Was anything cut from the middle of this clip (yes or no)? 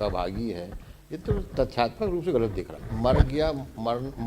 yes